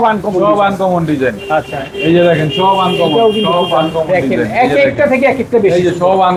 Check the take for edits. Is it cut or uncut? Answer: uncut